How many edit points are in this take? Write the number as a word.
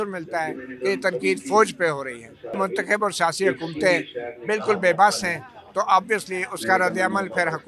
one